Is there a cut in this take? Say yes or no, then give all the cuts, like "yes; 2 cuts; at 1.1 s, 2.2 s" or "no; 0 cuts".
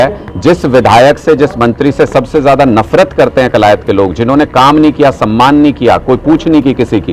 no; 0 cuts